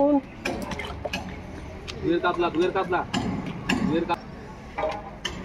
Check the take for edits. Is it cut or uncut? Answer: cut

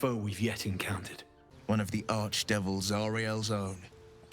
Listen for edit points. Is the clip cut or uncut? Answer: cut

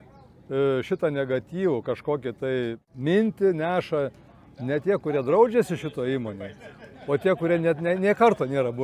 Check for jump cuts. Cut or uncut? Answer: cut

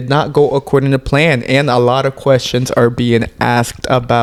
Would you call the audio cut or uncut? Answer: uncut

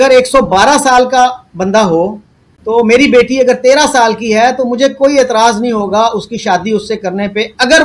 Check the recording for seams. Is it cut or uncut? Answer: uncut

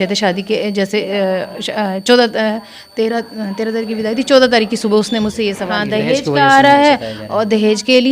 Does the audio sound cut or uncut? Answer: cut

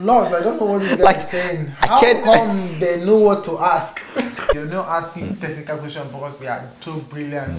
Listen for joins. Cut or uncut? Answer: cut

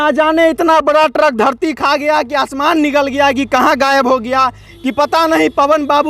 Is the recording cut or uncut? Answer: uncut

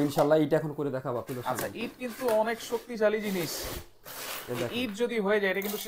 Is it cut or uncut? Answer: uncut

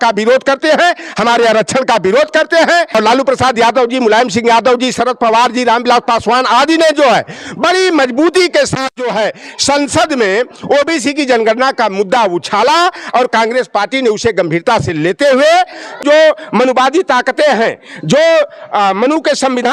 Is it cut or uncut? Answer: cut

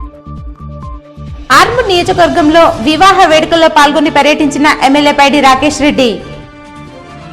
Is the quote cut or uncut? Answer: cut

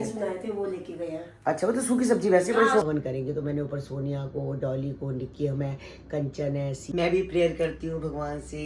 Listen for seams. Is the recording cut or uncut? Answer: cut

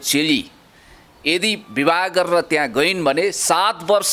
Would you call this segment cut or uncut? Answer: uncut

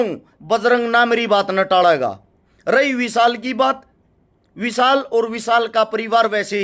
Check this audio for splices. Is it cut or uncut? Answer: uncut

